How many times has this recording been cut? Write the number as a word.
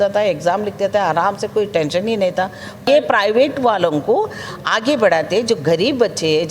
one